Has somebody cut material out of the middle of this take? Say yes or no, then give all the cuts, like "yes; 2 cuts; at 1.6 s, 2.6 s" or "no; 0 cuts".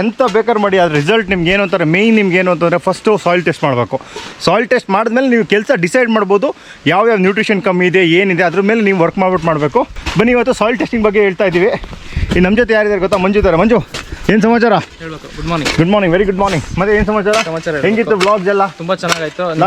no; 0 cuts